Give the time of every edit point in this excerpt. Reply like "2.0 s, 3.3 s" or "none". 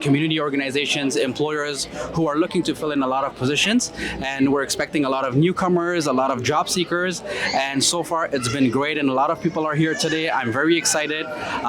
none